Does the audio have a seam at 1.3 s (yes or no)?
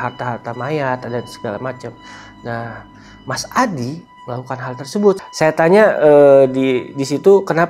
no